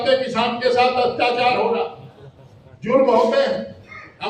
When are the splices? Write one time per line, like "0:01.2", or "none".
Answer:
none